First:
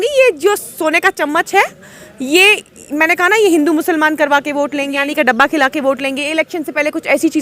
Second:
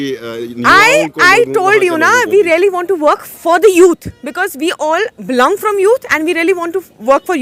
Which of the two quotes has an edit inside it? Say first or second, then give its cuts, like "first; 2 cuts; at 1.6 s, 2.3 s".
first; 1 cut; at 5.0 s